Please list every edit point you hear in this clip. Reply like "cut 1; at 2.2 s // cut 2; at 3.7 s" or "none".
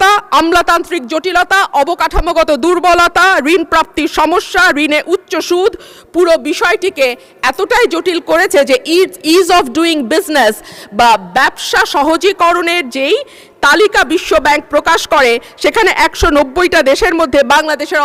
none